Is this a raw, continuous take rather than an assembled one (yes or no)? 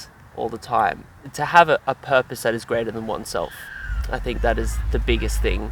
no